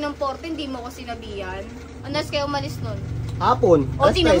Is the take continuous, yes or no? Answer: no